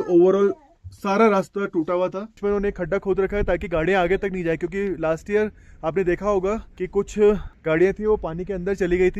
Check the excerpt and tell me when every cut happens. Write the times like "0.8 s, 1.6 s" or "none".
2.4 s, 6.7 s, 7.5 s